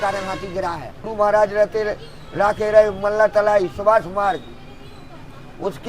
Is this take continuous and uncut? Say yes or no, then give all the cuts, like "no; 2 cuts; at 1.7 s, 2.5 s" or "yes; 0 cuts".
no; 1 cut; at 1.1 s